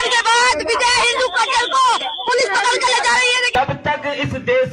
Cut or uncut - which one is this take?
cut